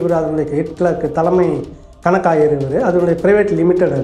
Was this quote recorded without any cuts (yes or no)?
yes